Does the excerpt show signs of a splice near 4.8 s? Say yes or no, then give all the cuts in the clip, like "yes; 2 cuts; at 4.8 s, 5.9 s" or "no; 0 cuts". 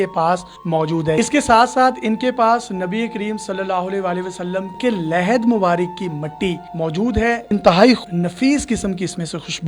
yes; 4 cuts; at 1.2 s, 4.8 s, 7.4 s, 8.0 s